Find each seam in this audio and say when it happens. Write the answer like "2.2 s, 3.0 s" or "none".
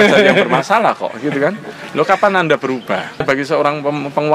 3.2 s